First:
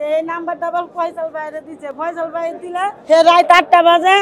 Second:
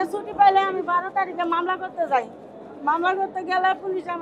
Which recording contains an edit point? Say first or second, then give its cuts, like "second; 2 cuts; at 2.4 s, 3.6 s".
first; 1 cut; at 3.0 s